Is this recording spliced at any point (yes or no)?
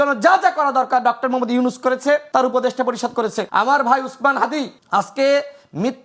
yes